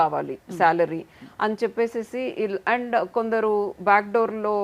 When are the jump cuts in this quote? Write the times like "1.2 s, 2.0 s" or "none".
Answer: none